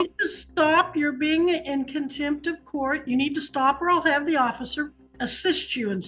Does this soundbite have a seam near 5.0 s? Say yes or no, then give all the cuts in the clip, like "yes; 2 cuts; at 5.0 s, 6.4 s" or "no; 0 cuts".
yes; 1 cut; at 5.0 s